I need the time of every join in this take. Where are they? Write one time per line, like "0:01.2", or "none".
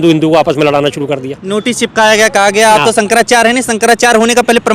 none